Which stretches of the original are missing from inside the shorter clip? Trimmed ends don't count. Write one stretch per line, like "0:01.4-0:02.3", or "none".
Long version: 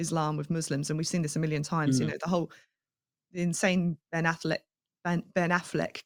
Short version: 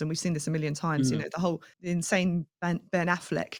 0:02.6-0:03.2
0:04.0-0:04.9